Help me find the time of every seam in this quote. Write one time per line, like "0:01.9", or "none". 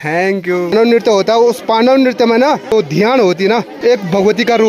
0:00.7
0:03.7